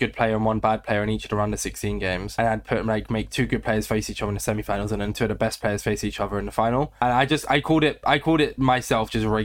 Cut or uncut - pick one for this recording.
uncut